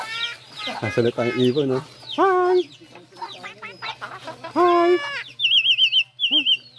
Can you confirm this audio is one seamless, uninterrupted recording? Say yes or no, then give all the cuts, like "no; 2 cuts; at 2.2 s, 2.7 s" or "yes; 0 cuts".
yes; 0 cuts